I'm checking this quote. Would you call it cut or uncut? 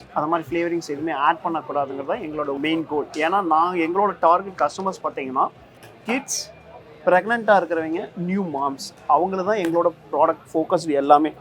uncut